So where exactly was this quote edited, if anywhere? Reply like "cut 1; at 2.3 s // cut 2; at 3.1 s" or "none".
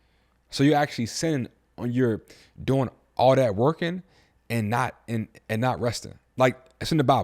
none